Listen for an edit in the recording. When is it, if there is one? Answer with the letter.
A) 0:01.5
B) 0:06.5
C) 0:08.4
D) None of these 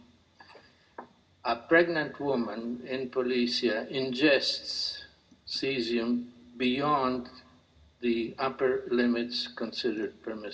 C